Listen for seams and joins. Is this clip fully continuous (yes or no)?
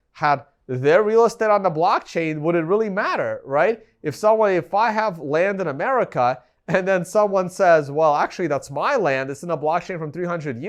yes